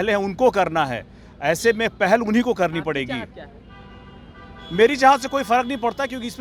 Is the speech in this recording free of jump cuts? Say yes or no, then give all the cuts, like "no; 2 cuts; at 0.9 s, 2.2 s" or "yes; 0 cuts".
yes; 0 cuts